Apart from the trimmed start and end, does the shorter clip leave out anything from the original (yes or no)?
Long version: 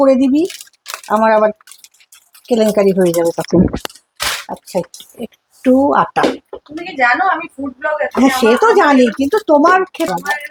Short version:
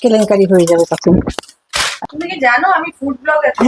yes